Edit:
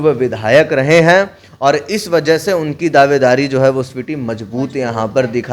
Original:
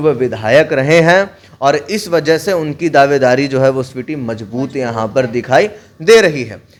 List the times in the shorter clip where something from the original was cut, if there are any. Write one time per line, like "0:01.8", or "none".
none